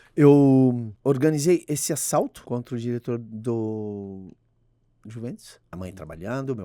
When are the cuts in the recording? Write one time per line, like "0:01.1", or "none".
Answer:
0:00.9
0:02.4
0:05.7